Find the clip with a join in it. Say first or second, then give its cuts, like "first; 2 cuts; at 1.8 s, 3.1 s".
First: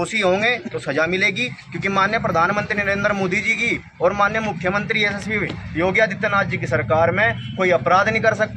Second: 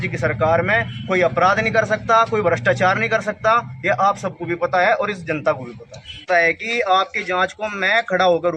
second; 1 cut; at 6.2 s